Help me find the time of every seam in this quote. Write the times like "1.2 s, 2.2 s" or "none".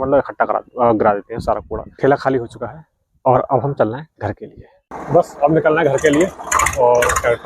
1.8 s

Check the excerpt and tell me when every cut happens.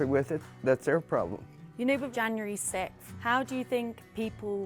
1.7 s

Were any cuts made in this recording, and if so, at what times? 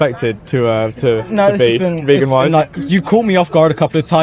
none

